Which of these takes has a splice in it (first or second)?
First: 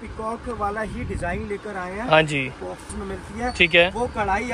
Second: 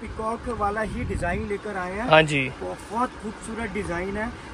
first